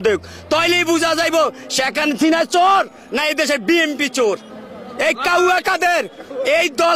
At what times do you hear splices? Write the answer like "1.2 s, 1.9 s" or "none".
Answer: 4.4 s